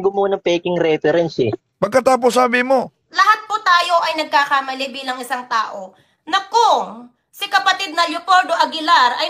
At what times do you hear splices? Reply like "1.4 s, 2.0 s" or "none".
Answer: 1.6 s, 3.0 s

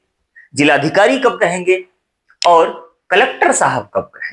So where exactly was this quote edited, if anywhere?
none

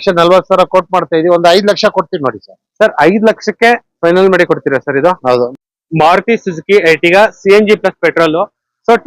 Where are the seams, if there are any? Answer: 5.5 s

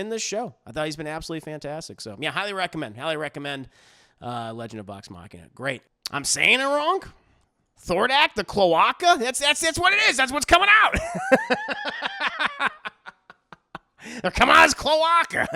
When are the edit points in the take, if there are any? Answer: 5.9 s

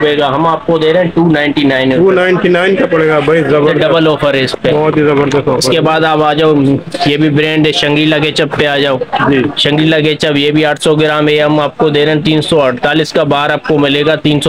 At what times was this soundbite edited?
none

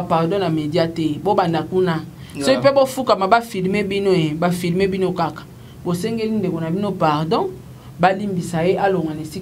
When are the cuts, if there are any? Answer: none

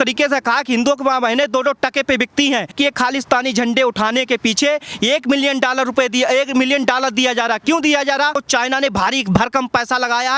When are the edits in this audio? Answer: 2.7 s, 8.4 s

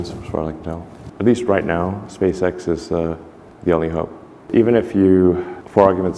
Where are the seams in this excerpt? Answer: 1.0 s

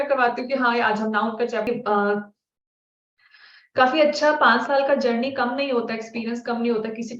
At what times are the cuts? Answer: 1.7 s

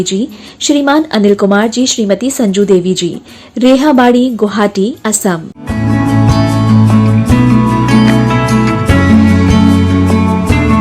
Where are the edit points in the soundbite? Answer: 5.6 s, 7.6 s

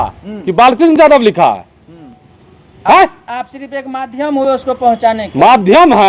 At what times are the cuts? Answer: none

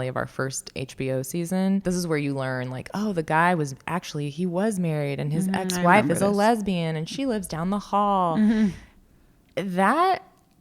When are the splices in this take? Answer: 1.8 s

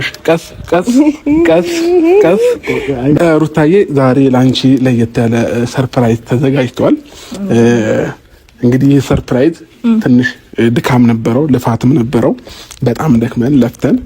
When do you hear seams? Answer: 3.2 s

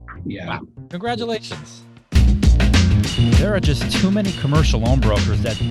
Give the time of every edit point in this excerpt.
2.2 s

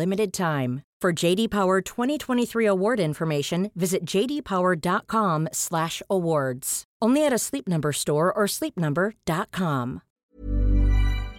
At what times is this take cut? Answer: 10.2 s

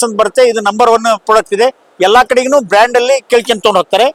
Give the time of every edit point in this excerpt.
none

